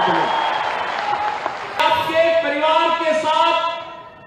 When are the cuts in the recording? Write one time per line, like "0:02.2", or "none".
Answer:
0:01.8